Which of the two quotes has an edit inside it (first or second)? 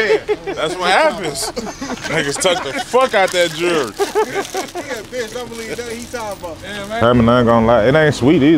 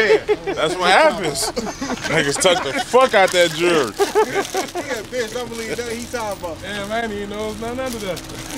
first